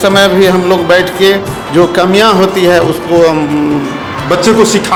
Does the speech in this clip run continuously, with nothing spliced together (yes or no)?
yes